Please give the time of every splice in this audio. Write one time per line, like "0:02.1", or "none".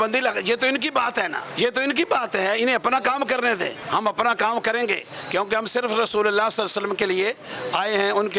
0:01.4
0:03.8